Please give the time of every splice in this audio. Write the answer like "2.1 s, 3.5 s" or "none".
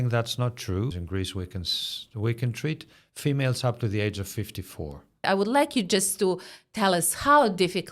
1.0 s, 5.2 s